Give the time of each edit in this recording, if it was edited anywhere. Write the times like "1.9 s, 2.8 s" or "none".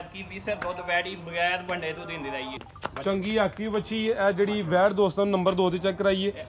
2.7 s